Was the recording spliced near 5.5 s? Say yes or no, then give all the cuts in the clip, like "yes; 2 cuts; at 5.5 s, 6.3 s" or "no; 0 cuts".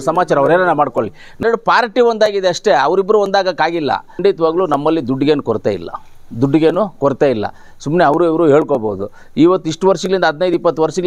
no; 2 cuts; at 1.4 s, 4.2 s